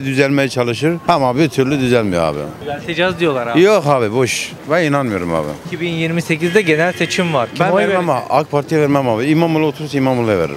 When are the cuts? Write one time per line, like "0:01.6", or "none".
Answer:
0:02.5
0:05.6

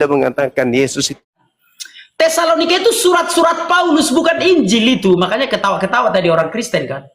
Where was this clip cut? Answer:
0:01.2

